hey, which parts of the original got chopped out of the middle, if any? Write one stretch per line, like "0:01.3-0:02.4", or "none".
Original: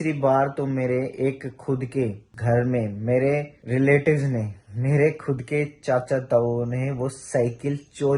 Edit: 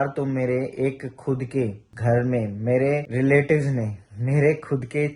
0:03.5-0:03.6